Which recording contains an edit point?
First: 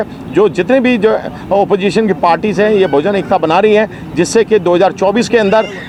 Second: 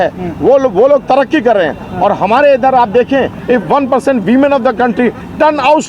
second; 1 cut; at 3.4 s

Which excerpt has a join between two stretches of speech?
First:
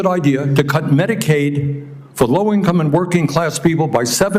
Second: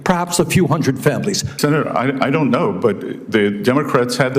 second; 1 cut; at 1.5 s

